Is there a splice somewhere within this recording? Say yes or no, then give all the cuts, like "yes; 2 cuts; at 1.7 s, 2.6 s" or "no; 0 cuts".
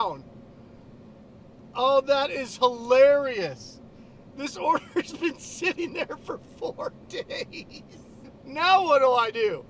yes; 1 cut; at 8.2 s